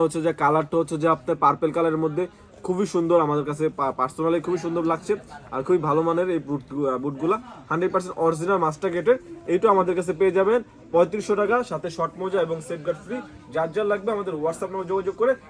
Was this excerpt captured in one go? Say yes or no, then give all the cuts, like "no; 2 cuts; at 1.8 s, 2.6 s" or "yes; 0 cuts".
yes; 0 cuts